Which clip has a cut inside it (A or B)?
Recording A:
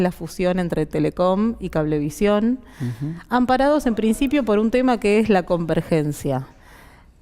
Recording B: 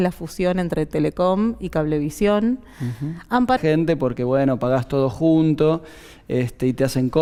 A